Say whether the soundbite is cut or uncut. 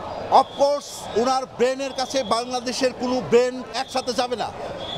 cut